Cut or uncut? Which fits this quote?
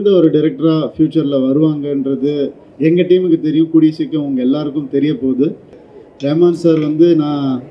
cut